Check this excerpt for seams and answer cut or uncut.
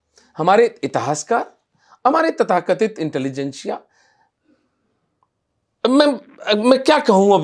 uncut